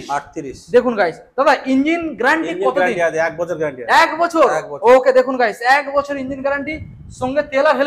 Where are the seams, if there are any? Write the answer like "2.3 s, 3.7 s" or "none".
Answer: none